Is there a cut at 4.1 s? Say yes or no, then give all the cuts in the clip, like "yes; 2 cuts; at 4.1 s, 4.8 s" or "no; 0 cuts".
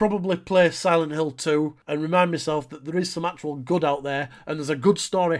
no; 1 cut; at 1.8 s